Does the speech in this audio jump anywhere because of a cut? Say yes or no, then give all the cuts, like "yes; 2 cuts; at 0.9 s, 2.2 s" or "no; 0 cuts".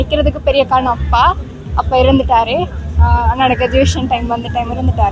no; 0 cuts